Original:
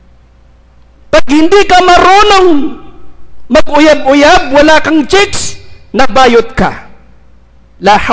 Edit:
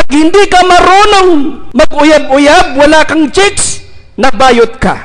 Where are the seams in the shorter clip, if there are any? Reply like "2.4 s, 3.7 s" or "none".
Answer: 1.6 s